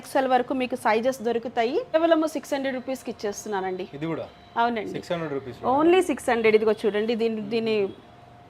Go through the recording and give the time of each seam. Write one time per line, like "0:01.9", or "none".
0:01.9